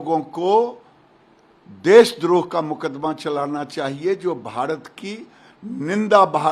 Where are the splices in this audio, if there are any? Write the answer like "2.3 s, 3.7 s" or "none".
none